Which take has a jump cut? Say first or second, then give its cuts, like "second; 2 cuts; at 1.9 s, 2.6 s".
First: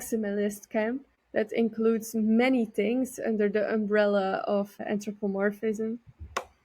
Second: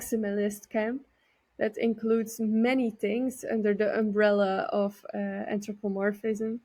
first; 2 cuts; at 1.1 s, 4.8 s